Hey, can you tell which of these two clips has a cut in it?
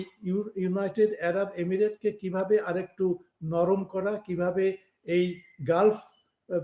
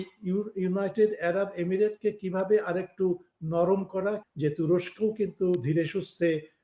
second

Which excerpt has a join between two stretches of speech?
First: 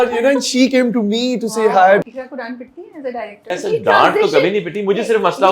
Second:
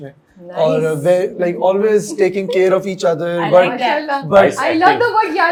first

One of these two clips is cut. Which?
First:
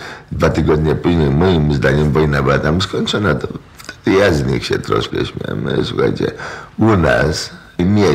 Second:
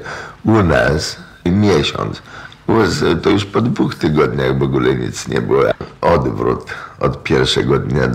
second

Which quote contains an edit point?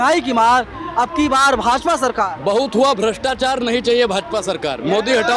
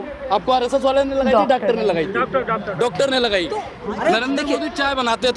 second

